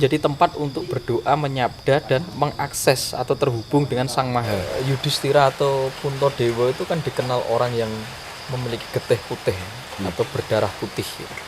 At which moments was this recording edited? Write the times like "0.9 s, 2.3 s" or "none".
4.6 s